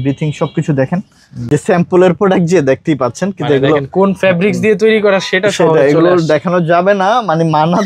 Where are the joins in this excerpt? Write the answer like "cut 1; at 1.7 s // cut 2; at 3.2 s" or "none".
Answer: cut 1; at 1.5 s